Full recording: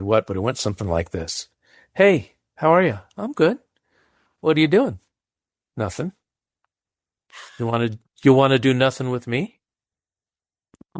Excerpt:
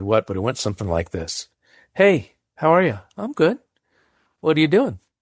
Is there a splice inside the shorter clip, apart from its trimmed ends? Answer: no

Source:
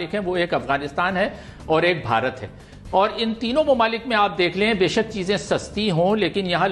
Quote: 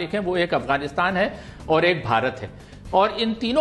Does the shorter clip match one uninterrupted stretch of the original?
yes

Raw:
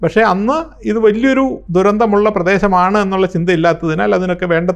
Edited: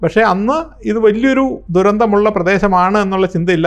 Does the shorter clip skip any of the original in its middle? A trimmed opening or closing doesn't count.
no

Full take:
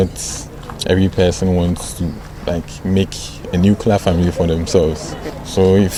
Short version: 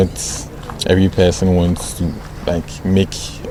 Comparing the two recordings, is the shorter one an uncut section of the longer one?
yes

